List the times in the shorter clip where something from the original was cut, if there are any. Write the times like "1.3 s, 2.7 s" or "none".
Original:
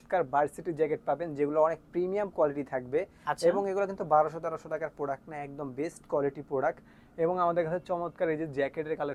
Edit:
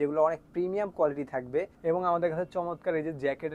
1.7 s